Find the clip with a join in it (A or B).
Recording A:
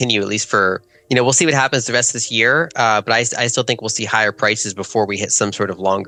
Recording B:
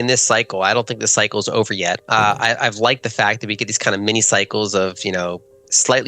B